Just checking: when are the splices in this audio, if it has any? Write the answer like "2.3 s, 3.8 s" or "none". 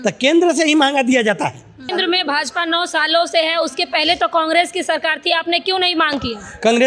1.9 s